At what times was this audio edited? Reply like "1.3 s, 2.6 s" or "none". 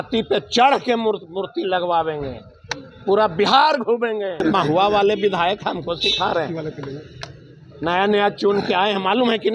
4.4 s